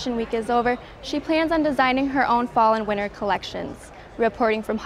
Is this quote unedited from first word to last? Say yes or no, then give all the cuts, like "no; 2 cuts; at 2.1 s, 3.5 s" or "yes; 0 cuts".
yes; 0 cuts